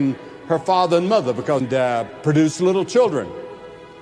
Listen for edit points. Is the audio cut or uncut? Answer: cut